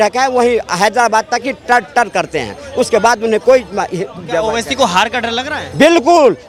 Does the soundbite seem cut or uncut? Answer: uncut